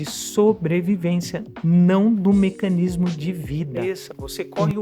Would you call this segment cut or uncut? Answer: cut